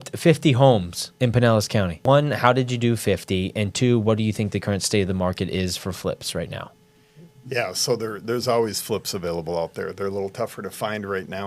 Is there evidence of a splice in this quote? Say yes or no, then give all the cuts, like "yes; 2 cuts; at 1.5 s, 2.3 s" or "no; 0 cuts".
yes; 2 cuts; at 1.0 s, 2.0 s